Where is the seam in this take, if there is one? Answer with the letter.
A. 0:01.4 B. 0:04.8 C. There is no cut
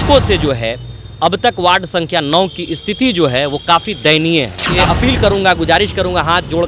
B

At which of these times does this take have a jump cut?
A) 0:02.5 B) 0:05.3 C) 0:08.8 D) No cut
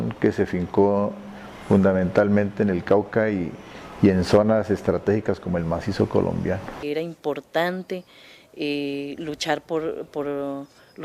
C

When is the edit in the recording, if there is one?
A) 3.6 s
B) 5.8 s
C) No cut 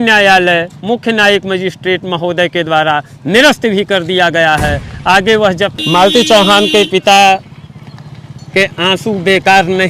B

